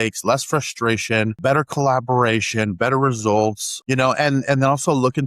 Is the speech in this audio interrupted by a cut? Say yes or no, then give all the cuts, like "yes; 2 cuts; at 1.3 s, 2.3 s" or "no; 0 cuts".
yes; 2 cuts; at 1.4 s, 3.7 s